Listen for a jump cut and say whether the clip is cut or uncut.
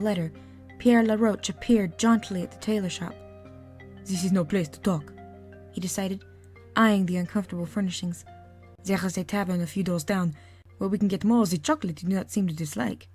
cut